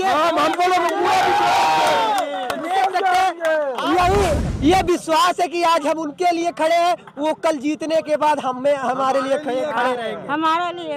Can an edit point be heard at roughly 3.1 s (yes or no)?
no